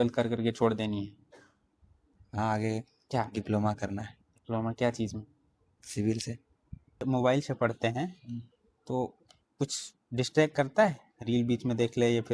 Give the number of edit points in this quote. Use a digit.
1